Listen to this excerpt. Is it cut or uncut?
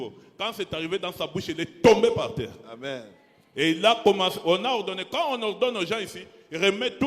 uncut